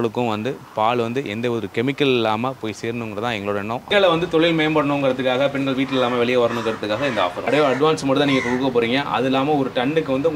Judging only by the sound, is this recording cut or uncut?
cut